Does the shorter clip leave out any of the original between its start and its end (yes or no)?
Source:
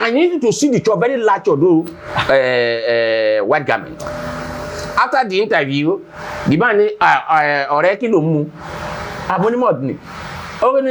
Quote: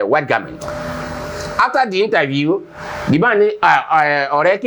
no